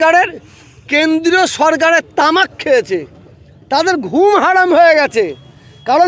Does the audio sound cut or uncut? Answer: uncut